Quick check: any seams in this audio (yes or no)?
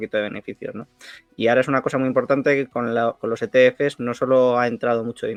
no